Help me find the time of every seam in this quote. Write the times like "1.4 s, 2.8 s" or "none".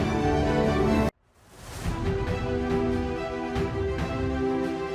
0.9 s